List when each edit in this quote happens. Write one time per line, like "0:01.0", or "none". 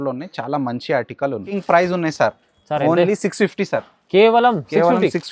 0:01.5